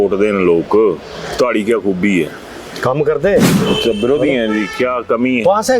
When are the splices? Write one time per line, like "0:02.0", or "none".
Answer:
0:03.5